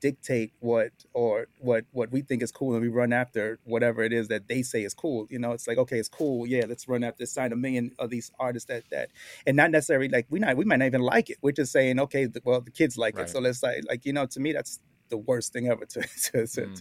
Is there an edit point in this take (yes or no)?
no